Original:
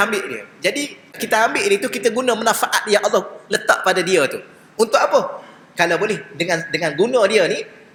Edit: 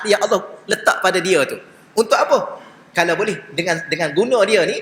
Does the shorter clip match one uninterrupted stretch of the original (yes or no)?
yes